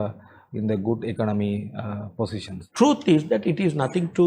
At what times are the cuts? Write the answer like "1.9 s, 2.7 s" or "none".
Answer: 2.6 s